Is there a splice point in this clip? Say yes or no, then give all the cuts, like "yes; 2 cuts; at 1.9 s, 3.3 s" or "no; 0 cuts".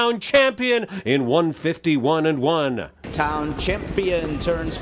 yes; 2 cuts; at 0.9 s, 3.0 s